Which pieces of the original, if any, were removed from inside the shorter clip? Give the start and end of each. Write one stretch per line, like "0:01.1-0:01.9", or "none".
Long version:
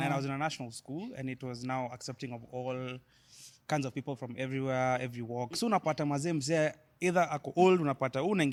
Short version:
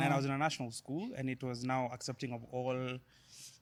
none